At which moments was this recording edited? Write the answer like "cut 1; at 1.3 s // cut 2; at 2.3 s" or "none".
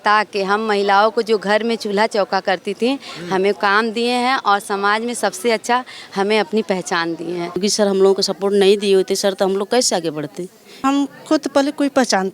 cut 1; at 7.6 s // cut 2; at 10.8 s